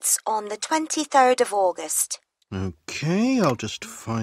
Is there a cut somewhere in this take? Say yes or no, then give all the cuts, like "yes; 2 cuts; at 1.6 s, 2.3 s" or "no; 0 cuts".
no; 0 cuts